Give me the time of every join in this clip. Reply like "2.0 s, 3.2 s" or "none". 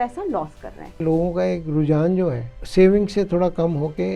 1.0 s, 2.5 s